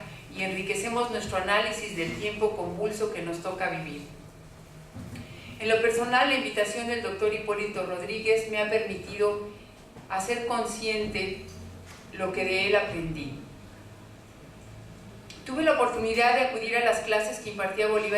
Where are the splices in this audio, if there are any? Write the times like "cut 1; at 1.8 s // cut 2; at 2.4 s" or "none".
cut 1; at 8.0 s